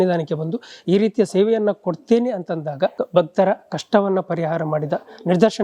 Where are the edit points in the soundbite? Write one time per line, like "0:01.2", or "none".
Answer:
0:03.0